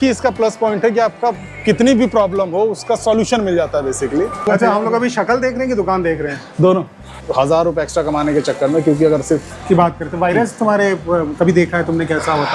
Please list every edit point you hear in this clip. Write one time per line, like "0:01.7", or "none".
0:04.5
0:07.2
0:09.5